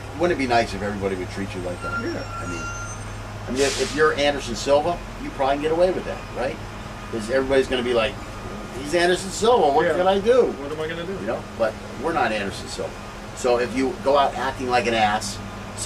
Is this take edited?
yes; 1 cut; at 13.2 s

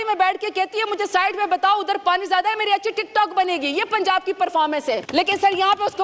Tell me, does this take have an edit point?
yes; 1 cut; at 5.0 s

